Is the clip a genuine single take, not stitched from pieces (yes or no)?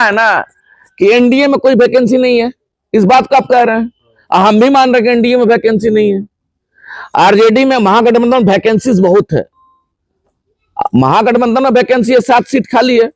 yes